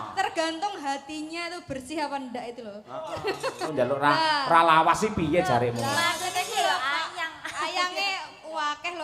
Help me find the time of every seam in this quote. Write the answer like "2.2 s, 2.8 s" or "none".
3.7 s